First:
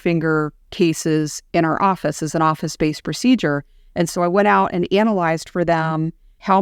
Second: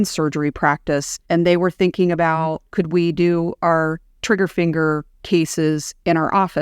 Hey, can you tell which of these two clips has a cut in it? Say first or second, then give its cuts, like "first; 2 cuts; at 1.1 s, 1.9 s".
second; 2 cuts; at 1.1 s, 2.6 s